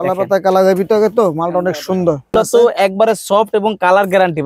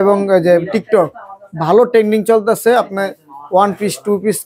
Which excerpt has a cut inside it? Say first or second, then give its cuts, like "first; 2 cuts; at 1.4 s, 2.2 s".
first; 1 cut; at 2.3 s